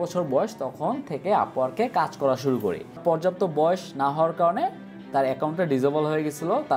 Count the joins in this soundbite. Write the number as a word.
one